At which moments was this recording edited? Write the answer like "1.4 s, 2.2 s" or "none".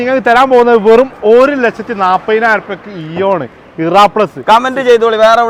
none